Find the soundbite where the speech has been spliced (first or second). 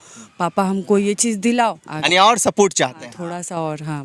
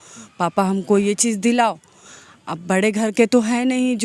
first